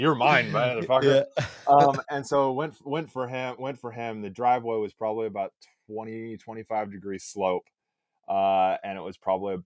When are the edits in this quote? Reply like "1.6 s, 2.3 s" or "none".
none

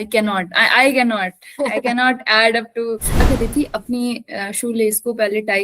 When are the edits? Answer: 3.2 s

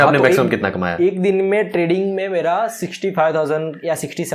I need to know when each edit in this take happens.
none

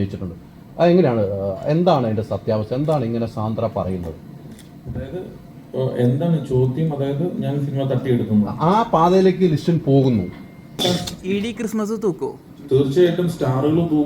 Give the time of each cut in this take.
10.8 s

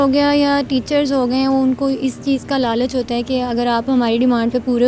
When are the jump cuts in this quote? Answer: none

